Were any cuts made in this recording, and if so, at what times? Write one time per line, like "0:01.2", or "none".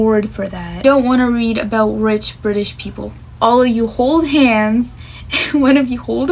0:00.8
0:03.2